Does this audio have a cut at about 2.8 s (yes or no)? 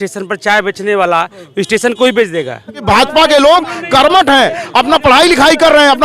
yes